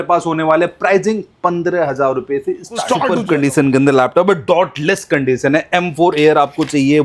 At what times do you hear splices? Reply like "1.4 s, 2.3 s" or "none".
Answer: 3.2 s